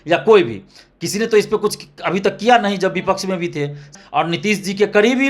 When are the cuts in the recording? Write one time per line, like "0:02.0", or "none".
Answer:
0:03.9